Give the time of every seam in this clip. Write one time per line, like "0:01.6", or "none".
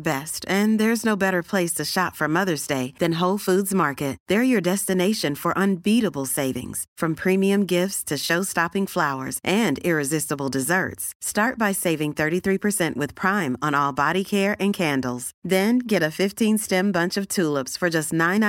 none

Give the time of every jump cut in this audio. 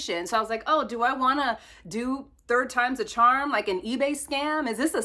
none

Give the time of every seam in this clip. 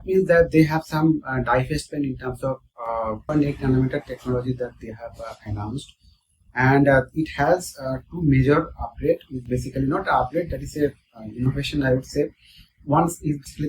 0:03.3

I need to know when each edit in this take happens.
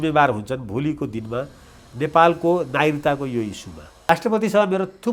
0:04.1

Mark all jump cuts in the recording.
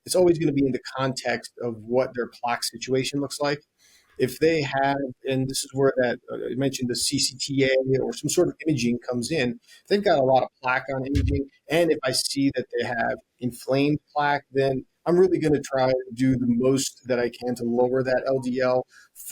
none

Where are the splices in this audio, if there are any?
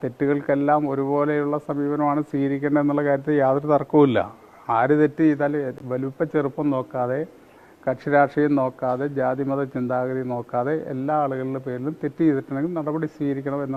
none

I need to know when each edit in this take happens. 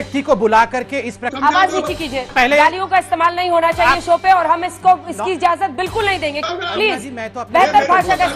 0:01.3
0:02.3
0:06.4

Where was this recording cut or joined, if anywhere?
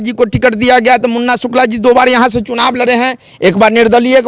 none

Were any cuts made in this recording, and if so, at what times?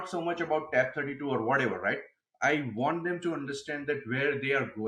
none

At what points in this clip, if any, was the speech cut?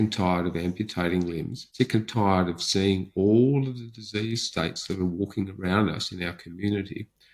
0:01.6

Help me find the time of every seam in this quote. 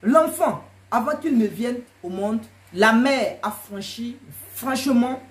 0:02.6

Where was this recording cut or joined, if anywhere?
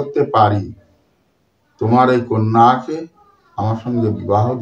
none

